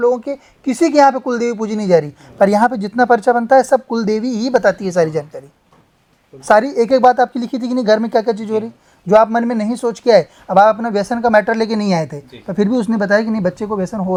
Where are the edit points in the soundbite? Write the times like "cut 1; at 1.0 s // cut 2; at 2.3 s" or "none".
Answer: none